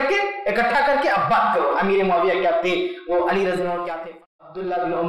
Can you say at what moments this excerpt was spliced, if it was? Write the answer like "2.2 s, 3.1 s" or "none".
4.1 s